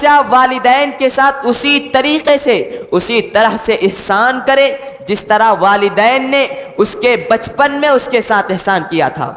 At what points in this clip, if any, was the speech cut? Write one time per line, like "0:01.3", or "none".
none